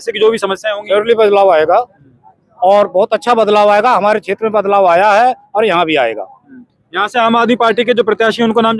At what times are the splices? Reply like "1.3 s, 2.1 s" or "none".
none